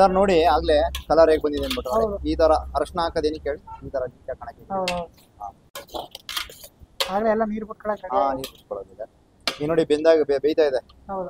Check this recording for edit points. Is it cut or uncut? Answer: uncut